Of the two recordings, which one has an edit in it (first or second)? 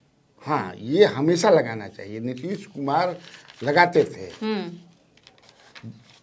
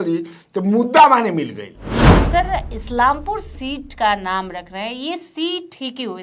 second